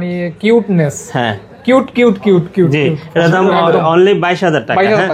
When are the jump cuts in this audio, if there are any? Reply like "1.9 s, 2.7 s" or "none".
none